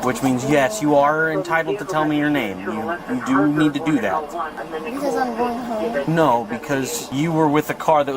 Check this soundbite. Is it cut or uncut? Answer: cut